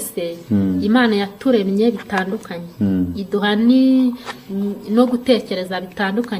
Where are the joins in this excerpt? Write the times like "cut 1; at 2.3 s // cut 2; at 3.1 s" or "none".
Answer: none